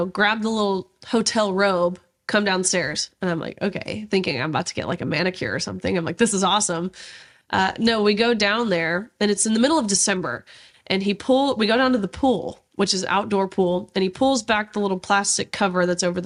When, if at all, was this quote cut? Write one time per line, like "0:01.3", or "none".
none